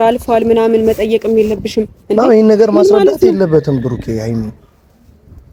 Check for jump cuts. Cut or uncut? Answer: uncut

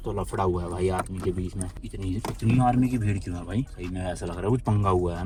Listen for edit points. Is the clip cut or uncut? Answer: uncut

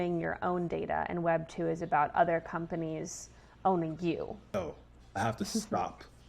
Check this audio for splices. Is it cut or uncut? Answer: cut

